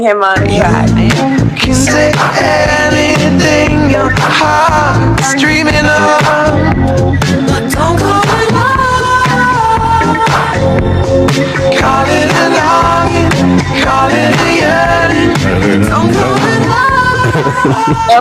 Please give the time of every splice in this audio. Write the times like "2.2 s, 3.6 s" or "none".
6.6 s